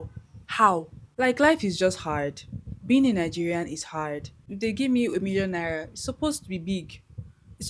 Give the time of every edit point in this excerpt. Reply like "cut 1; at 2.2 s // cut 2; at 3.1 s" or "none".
cut 1; at 1.1 s // cut 2; at 4.5 s